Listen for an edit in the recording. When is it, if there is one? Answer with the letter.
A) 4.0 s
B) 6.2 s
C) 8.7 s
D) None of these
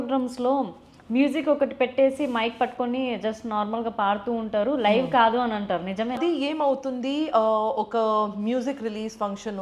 B